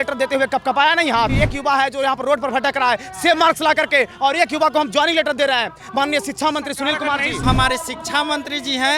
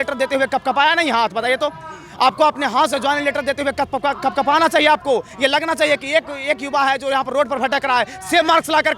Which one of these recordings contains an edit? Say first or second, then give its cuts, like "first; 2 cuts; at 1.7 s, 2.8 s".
first; 2 cuts; at 1.3 s, 7.4 s